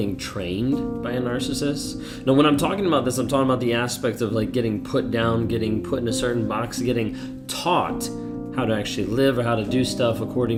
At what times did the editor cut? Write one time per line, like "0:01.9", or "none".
none